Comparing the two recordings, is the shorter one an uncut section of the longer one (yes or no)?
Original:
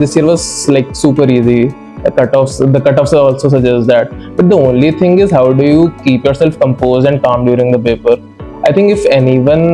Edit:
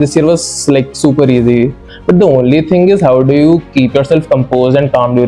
no